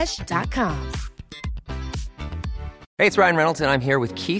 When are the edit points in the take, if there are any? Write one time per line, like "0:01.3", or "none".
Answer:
0:02.8

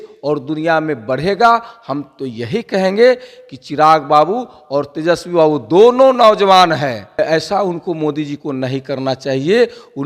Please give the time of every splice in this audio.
0:07.2

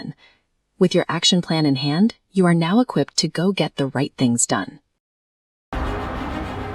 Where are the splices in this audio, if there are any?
none

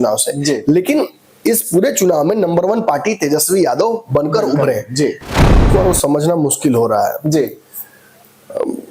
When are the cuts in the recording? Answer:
0:05.7

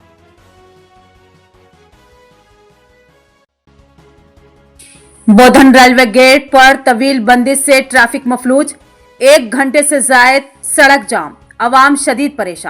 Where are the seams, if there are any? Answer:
0:10.6

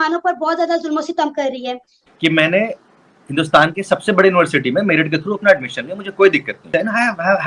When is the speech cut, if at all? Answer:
0:02.0
0:06.6

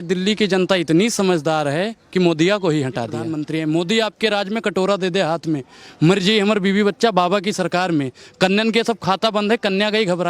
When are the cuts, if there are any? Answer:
0:03.3

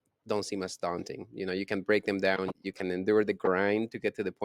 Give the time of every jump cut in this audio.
0:02.6

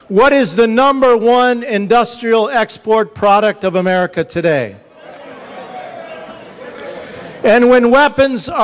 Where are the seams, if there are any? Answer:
0:02.0

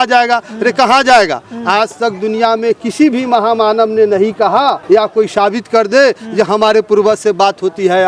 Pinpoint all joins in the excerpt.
0:04.8

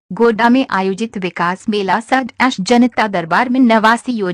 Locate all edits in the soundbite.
0:01.0
0:02.0

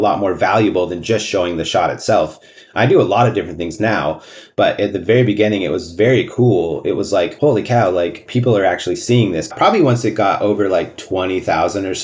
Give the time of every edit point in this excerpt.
0:07.3
0:08.2
0:09.5
0:11.0

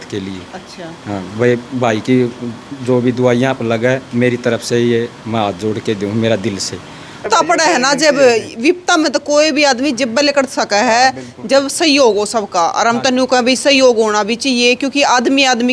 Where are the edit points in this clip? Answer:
0:07.2

